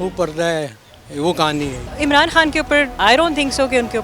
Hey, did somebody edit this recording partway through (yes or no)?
yes